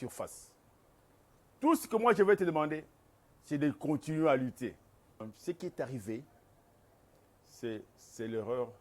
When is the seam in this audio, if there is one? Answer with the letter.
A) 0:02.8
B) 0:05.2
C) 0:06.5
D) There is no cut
B